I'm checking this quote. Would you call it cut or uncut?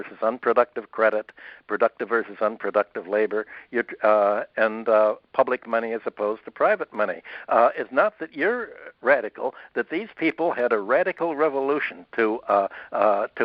uncut